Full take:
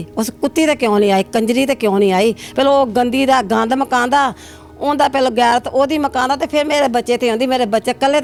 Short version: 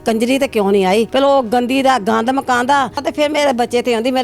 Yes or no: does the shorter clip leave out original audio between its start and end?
yes